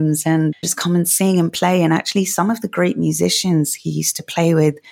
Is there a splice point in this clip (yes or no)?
no